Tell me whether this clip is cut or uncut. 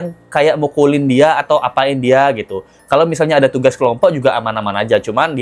uncut